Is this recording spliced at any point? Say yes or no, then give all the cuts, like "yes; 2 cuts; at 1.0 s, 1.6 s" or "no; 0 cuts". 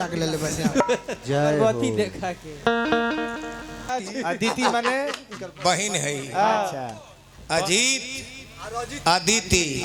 yes; 1 cut; at 3.9 s